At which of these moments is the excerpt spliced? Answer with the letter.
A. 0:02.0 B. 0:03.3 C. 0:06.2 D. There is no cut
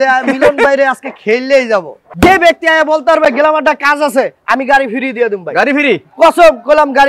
A